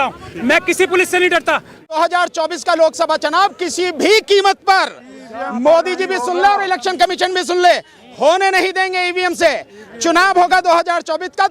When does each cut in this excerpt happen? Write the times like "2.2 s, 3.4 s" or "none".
2.0 s